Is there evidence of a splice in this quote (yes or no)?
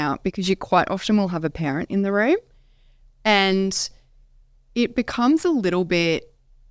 no